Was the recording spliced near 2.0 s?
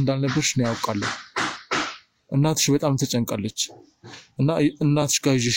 no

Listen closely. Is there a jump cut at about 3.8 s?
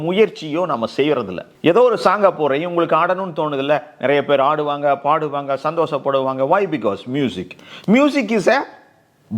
no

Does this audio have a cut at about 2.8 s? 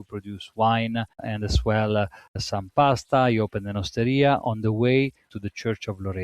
no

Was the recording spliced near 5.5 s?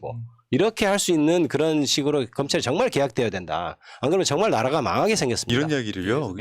yes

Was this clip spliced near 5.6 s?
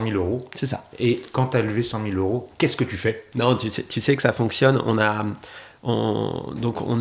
no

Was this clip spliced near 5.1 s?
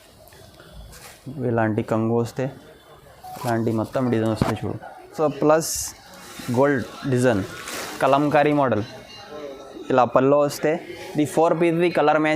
yes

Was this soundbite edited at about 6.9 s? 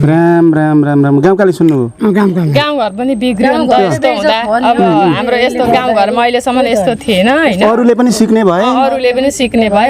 no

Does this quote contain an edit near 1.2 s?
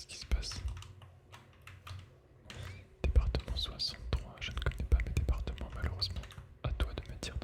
no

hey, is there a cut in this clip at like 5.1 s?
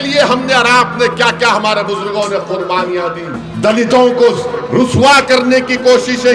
no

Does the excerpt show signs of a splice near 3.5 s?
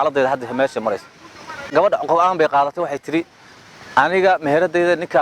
no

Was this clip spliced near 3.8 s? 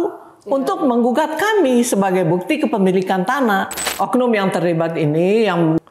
yes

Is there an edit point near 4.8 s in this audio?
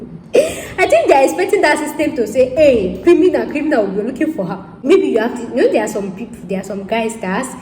yes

